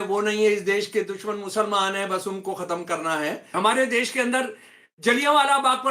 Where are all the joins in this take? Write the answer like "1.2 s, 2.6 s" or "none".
3.5 s